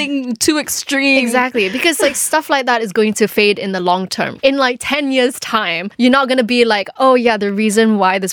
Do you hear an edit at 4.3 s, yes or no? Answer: yes